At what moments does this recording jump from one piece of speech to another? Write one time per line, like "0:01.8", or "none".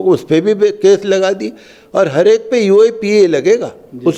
none

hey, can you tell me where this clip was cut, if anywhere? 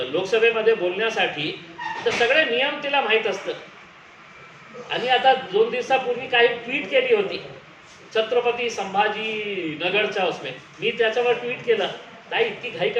none

